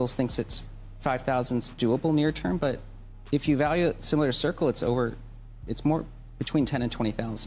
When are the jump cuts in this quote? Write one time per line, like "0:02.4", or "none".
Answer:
none